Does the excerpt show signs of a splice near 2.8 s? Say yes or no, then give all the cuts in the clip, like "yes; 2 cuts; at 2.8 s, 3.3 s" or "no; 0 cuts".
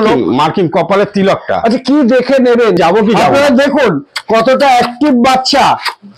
yes; 1 cut; at 2.8 s